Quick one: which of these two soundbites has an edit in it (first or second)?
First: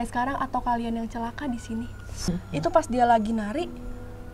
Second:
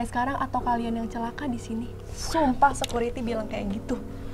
first